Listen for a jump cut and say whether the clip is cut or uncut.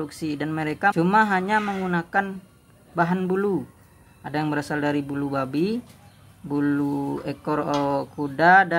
cut